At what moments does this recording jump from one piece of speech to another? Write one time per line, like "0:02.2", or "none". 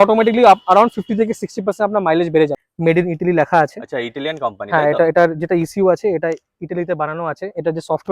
0:02.6